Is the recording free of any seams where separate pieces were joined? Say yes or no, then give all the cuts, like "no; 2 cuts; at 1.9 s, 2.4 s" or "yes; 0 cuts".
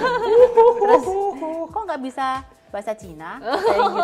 yes; 0 cuts